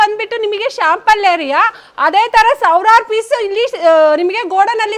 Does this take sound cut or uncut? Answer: uncut